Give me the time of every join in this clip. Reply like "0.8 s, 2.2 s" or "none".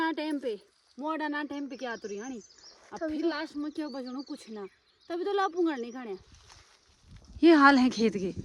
6.2 s